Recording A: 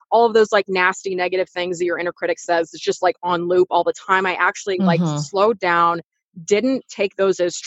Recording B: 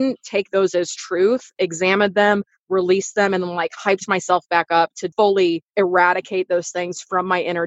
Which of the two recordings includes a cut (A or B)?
B